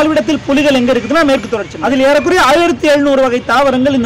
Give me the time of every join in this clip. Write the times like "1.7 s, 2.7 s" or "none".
1.7 s